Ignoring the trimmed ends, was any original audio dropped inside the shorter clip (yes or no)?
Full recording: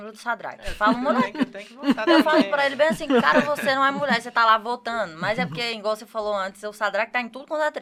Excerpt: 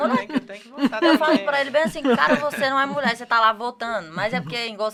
no